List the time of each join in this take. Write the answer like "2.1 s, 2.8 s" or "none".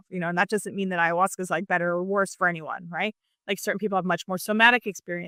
none